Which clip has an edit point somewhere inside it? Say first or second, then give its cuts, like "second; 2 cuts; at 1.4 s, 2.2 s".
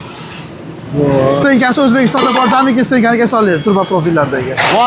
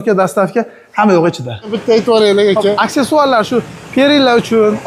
second; 1 cut; at 1.8 s